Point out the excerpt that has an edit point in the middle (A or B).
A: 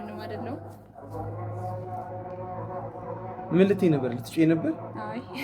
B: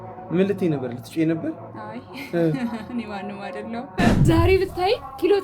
B